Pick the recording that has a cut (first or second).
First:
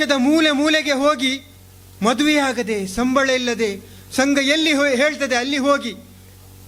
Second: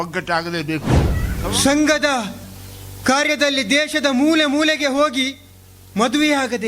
second